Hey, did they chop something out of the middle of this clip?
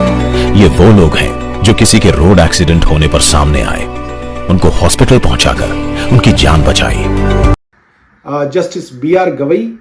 yes; 1 cut; at 7.5 s

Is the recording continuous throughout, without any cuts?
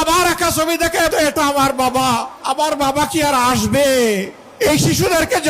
no; 3 cuts; at 1.1 s, 2.3 s, 4.4 s

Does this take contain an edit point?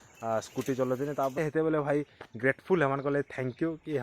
yes; 1 cut; at 1.4 s

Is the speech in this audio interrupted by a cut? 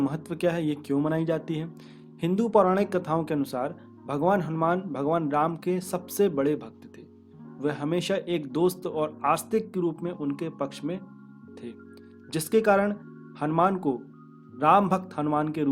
no; 0 cuts

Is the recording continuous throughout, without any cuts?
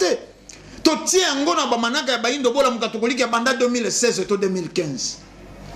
yes; 0 cuts

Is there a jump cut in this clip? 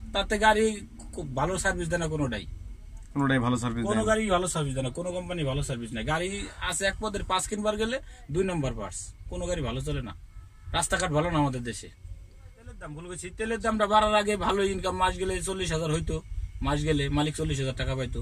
yes; 1 cut; at 13.0 s

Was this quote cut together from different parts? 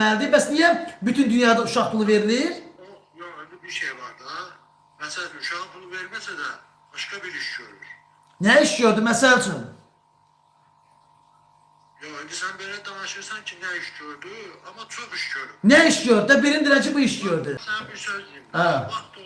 no; 0 cuts

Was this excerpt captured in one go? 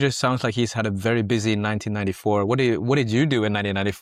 yes; 0 cuts

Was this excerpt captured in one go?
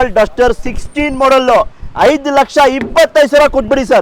yes; 0 cuts

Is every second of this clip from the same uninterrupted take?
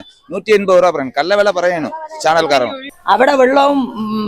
no; 1 cut; at 2.9 s

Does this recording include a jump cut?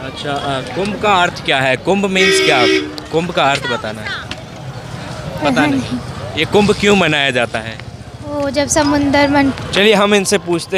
yes; 1 cut; at 9.5 s

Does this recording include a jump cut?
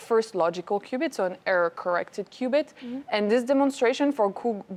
no; 0 cuts

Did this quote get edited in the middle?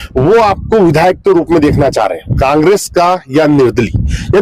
no; 0 cuts

